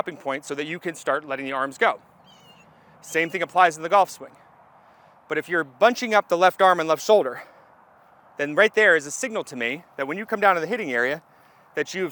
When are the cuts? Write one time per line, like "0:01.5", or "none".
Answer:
none